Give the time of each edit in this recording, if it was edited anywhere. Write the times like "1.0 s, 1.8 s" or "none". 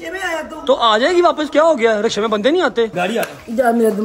2.9 s